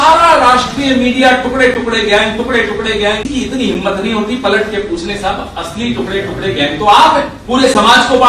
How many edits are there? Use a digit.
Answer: 2